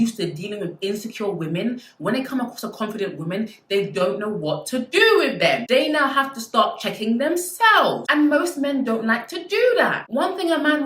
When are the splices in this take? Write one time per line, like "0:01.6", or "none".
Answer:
none